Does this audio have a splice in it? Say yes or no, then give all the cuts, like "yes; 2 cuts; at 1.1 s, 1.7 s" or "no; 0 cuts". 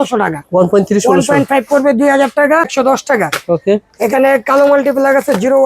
yes; 1 cut; at 2.7 s